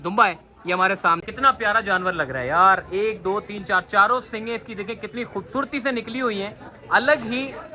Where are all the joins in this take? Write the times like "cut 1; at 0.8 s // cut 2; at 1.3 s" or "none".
cut 1; at 1.2 s